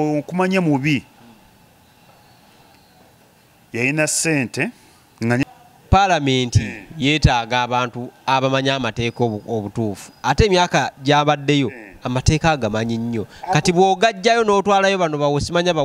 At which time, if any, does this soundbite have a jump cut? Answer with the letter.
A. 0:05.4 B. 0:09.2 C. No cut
A